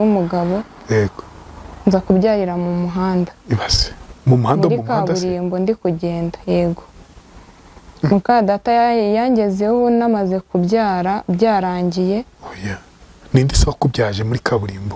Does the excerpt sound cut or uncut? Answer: uncut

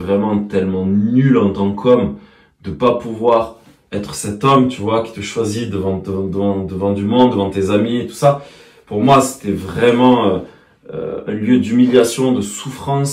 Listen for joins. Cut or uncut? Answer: uncut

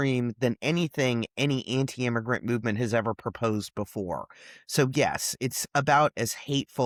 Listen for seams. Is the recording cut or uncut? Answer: uncut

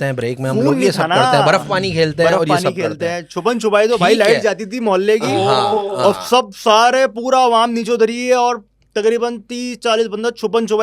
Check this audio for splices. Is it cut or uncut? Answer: uncut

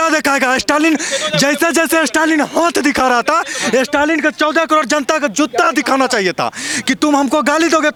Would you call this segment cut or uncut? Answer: uncut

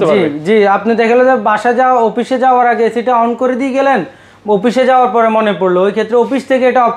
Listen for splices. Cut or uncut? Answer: uncut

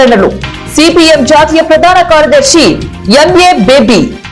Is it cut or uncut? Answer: uncut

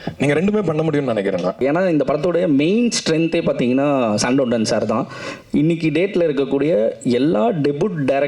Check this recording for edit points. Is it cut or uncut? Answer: cut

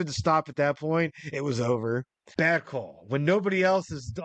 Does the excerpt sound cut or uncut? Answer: cut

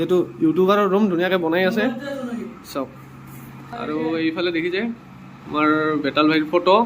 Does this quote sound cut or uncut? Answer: cut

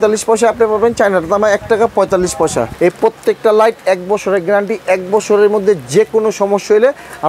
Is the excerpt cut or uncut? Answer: cut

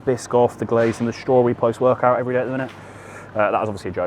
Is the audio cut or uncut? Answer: uncut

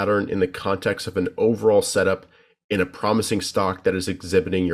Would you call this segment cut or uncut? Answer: uncut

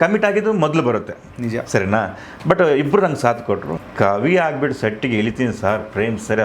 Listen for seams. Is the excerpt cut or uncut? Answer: cut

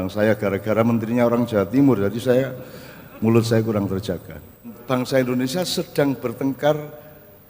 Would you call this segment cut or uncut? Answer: cut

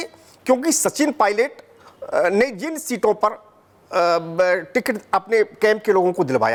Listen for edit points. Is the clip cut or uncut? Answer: uncut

